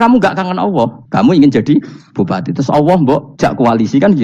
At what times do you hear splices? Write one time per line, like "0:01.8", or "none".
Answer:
0:01.0
0:03.3